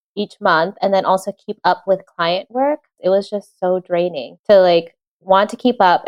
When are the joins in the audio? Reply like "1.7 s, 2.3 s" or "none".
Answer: 2.9 s, 4.3 s